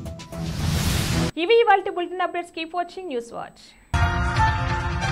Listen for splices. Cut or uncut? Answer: uncut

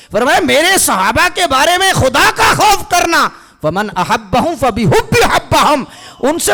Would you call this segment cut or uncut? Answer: uncut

